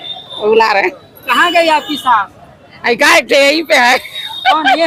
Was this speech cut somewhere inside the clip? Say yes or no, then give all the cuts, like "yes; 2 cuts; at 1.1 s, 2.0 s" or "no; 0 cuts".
no; 0 cuts